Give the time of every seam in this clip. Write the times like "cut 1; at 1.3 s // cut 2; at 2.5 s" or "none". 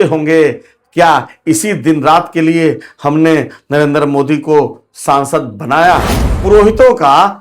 cut 1; at 6.2 s

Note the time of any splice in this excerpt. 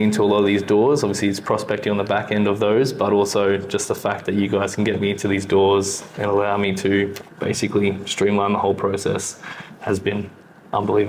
none

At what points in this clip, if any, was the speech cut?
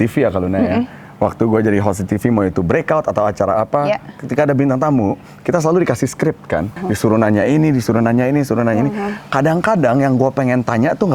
cut 1; at 6.8 s

